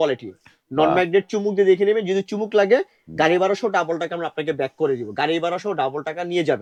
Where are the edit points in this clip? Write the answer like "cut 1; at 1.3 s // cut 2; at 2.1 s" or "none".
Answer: none